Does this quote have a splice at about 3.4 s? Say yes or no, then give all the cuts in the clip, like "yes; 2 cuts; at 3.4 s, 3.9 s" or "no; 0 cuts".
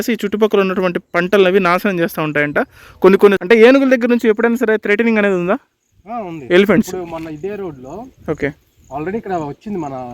yes; 1 cut; at 3.4 s